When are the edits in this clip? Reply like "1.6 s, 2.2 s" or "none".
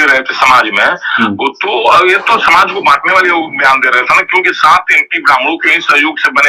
none